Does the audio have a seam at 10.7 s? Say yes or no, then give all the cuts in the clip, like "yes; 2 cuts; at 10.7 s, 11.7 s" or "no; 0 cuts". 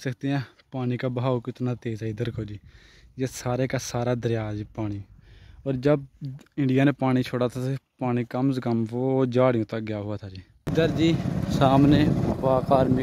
yes; 1 cut; at 10.7 s